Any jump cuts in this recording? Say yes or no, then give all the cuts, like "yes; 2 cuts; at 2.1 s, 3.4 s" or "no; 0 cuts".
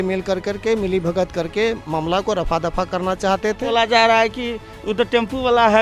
yes; 1 cut; at 3.6 s